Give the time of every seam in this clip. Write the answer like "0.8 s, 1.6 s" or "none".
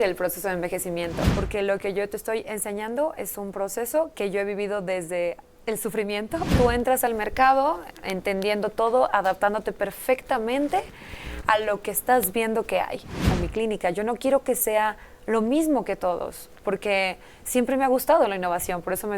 1.3 s, 4.1 s, 6.5 s, 13.3 s